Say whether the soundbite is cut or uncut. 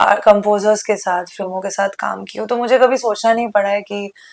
uncut